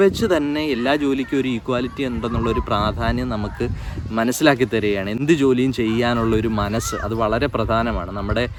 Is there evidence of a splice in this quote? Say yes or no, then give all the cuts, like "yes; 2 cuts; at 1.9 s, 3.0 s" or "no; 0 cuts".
no; 0 cuts